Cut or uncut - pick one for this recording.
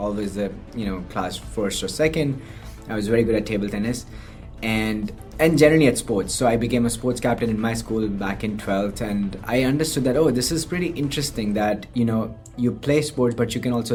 uncut